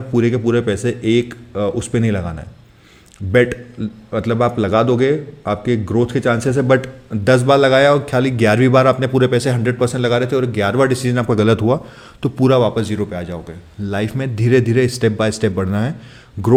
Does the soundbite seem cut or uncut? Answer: uncut